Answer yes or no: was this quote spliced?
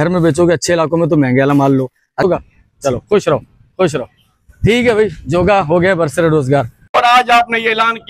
yes